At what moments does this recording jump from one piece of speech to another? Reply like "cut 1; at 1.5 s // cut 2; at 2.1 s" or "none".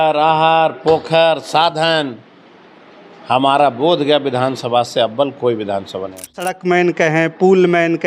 cut 1; at 6.5 s